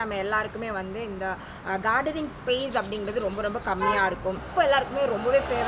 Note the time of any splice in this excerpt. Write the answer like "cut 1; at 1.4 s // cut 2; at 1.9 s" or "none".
cut 1; at 4.4 s